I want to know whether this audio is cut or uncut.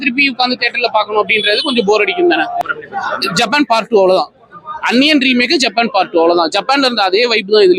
cut